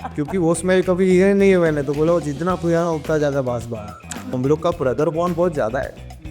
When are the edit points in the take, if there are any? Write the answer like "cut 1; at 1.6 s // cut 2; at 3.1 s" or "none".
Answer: cut 1; at 4.4 s